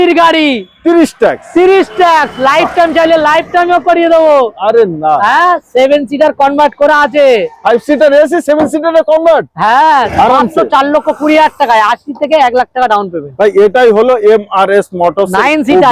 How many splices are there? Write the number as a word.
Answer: one